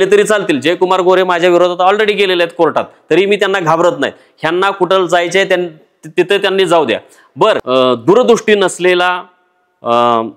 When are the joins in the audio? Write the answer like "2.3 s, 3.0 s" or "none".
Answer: 7.6 s